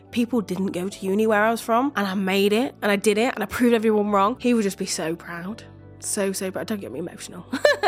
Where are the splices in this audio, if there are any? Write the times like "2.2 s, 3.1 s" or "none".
1.9 s, 4.4 s